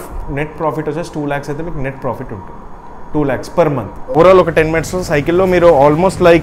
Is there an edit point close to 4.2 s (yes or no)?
yes